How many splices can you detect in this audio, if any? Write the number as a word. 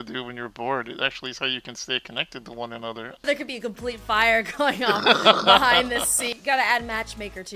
two